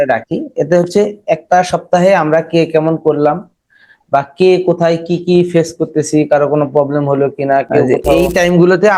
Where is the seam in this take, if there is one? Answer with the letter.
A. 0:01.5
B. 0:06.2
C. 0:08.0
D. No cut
C